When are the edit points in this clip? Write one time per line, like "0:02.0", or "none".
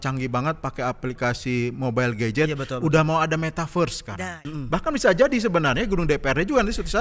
0:04.2